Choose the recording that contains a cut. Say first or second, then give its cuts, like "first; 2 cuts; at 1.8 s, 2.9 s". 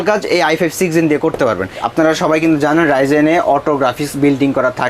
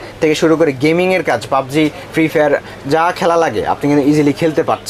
first; 1 cut; at 1.8 s